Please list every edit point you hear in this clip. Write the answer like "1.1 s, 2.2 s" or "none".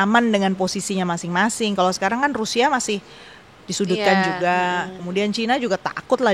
none